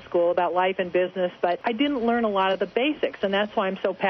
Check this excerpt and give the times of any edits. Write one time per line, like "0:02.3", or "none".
0:01.6